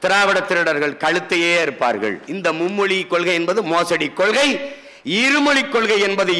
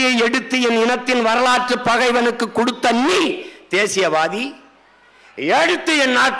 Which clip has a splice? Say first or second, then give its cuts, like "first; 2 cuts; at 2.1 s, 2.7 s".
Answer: first; 1 cut; at 2.3 s